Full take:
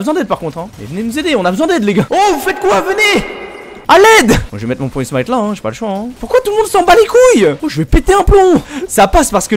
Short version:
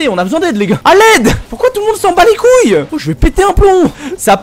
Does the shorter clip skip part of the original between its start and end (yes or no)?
yes